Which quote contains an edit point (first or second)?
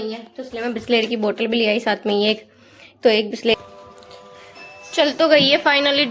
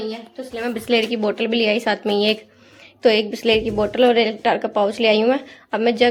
first